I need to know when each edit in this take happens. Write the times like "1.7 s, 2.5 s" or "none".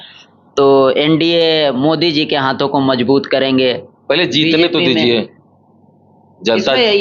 none